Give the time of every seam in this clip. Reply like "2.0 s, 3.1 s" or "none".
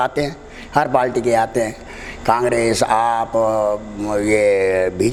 none